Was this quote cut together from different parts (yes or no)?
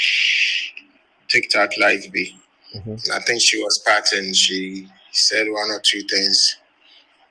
no